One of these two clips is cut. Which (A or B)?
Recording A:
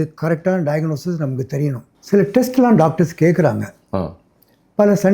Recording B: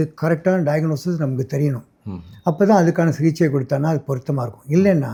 A